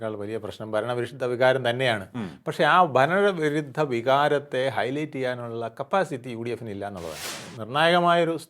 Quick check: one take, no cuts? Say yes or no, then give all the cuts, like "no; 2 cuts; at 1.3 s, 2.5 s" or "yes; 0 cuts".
no; 1 cut; at 7.2 s